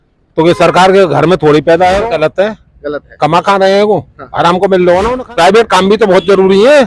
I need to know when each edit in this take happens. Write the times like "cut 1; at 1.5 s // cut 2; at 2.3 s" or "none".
cut 1; at 2.0 s // cut 2; at 5.2 s